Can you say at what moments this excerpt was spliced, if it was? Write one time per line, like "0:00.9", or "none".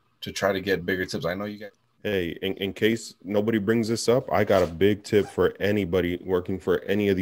0:01.5